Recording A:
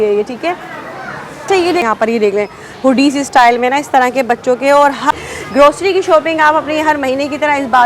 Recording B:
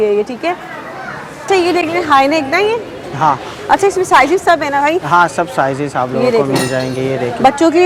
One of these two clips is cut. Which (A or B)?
A